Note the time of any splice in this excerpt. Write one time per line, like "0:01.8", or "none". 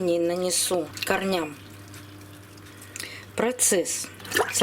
0:00.9
0:02.7